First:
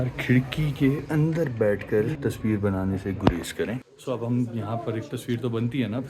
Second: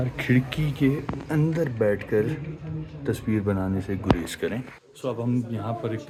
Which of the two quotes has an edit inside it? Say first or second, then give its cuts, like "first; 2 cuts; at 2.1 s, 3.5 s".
first; 3 cuts; at 1.0 s, 2.1 s, 3.9 s